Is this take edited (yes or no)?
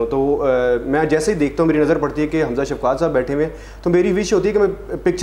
no